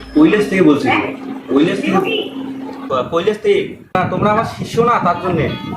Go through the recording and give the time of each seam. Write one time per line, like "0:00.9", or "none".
0:02.8